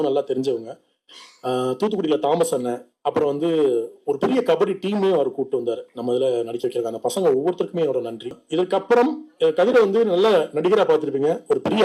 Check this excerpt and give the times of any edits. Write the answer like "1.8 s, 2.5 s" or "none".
8.4 s